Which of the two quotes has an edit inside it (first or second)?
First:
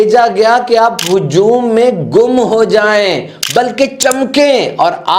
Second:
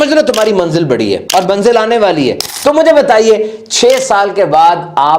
second